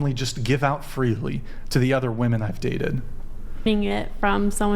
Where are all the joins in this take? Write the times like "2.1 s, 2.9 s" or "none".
3.7 s